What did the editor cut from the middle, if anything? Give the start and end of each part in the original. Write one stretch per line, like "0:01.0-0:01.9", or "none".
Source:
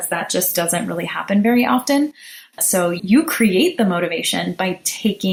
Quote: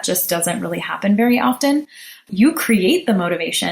0:02.5-0:03.0

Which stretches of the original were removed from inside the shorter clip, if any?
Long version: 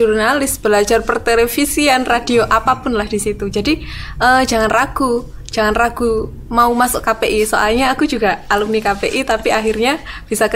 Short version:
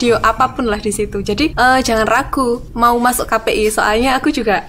0:03.8-0:04.2
0:05.3-0:06.4

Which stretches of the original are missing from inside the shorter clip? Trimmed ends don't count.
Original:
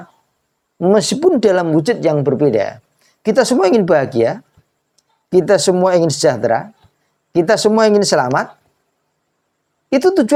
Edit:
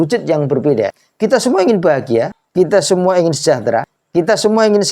0:02.8-0:03.1
0:04.4-0:05.2
0:06.7-0:07.2

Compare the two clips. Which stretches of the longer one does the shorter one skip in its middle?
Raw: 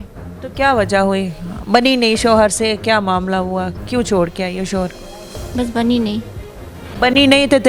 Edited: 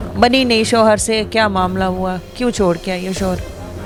none

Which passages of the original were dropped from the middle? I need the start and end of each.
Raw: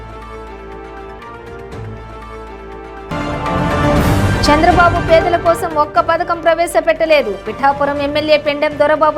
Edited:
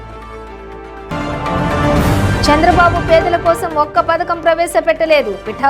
0:01.0-0:03.0

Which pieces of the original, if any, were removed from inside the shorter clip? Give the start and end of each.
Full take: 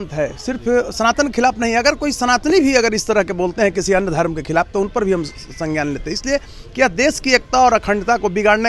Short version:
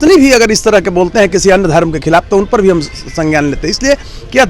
none

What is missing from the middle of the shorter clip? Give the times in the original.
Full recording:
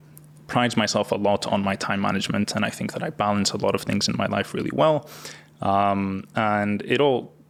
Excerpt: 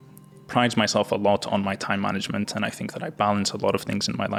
none

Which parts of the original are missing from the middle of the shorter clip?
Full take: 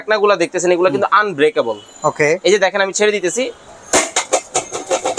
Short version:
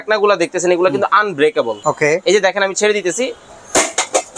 0:01.8-0:01.9

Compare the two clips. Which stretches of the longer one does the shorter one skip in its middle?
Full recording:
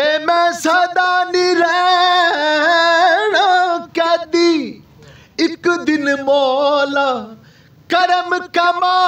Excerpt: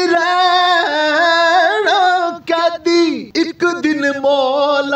0:04.7-0:05.3

